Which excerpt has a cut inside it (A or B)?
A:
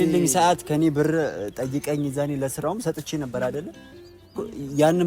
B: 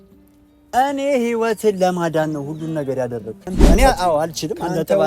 B